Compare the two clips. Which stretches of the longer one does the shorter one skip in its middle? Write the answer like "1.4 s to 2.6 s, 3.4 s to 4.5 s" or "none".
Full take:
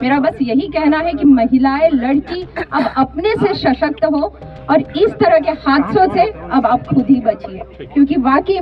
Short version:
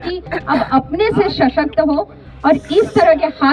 none